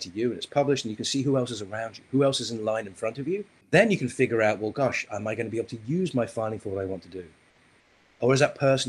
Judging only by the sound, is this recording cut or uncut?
cut